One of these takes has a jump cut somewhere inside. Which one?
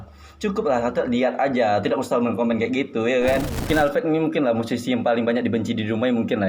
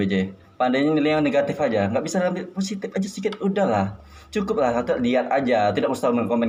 first; 1 cut; at 3.5 s

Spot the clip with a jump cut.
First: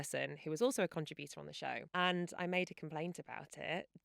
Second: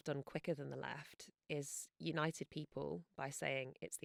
first; 1 cut; at 1.8 s

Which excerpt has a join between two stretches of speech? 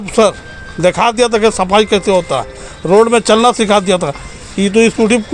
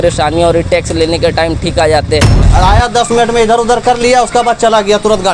second; 1 cut; at 2.4 s

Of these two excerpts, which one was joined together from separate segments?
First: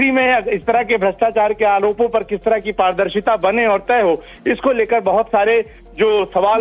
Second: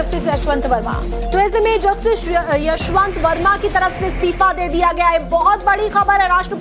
second; 1 cut; at 4.1 s

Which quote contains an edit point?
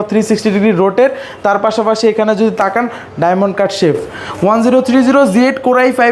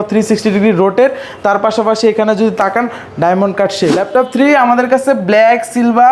second; 1 cut; at 4.0 s

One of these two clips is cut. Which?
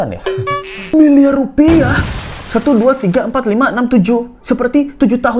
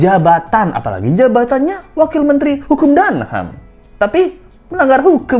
first; 1 cut; at 0.9 s

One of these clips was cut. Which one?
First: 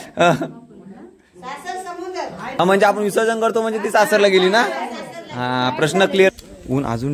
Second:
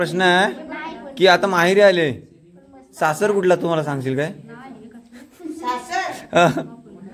first; 2 cuts; at 2.6 s, 6.3 s

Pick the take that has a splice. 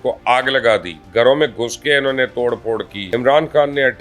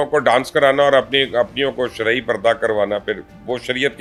first; 2 cuts; at 1.0 s, 3.0 s

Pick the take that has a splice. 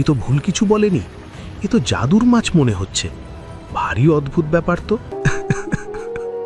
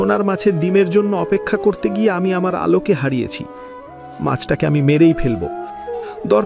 first; 1 cut; at 5.1 s

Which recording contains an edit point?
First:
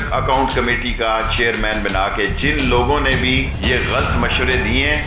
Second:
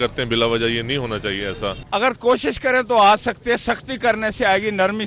second; 1 cut; at 1.8 s

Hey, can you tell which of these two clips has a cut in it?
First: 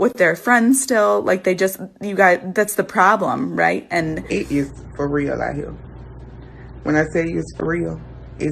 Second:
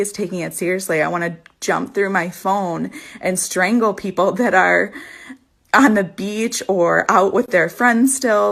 first; 1 cut; at 4.2 s

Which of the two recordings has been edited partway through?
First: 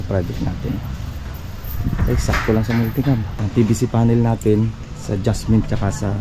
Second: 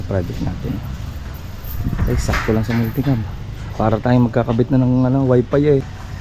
first; 1 cut; at 3.4 s

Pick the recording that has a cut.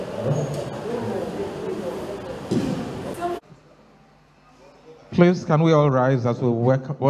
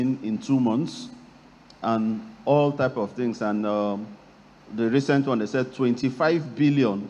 first; 1 cut; at 3.4 s

